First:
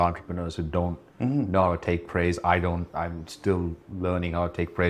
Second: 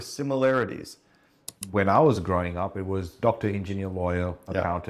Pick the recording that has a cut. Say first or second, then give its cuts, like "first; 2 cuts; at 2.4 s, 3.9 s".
second; 1 cut; at 1.5 s